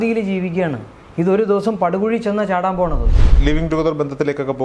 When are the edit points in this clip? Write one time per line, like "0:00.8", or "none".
0:03.3

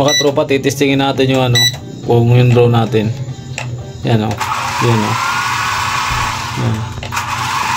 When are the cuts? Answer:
none

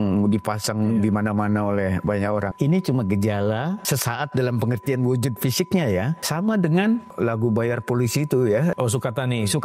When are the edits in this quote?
0:02.5
0:03.8
0:06.2
0:07.1
0:08.7

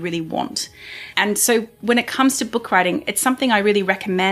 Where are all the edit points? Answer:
none

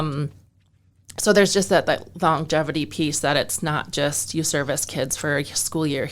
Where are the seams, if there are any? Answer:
none

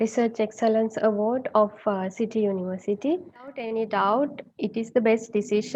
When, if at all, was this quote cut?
0:03.7

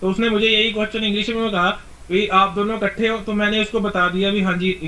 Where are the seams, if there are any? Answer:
none

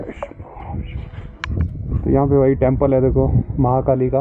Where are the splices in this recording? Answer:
0:02.0

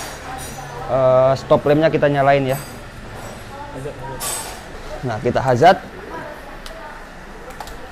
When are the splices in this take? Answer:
none

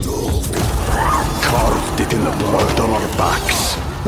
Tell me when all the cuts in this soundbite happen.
none

